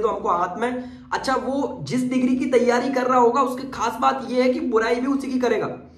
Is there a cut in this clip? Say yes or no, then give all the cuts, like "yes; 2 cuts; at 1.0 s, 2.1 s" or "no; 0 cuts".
no; 0 cuts